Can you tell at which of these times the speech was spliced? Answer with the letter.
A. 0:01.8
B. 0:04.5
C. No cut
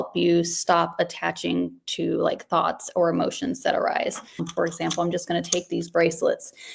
B